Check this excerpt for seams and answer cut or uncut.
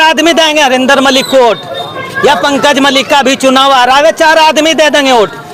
uncut